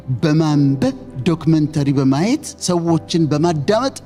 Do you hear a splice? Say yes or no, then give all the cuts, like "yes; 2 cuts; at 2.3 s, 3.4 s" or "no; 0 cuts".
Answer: no; 0 cuts